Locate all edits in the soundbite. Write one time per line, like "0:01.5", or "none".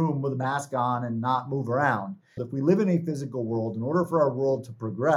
0:02.5

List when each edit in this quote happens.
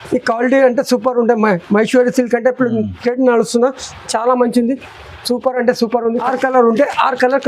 0:06.2

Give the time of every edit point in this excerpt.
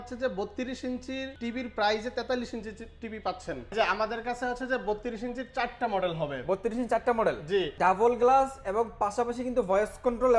0:01.3
0:03.7
0:07.7

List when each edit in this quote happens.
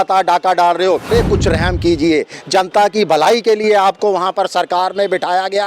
0:01.0

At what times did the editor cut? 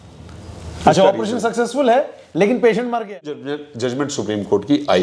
0:03.4

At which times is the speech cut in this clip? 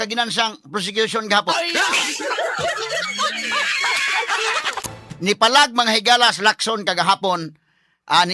0:04.9

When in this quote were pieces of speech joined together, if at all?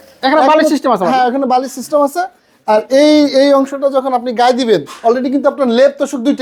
none

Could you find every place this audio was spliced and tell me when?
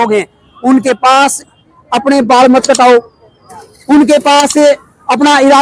none

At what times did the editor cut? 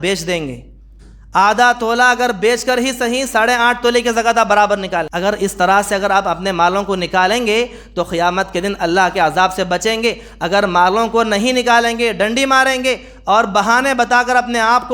0:05.1

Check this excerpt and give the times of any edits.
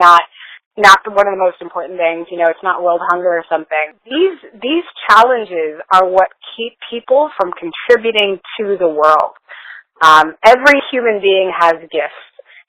0:04.0

